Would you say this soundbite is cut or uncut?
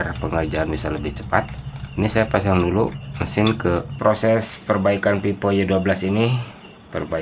cut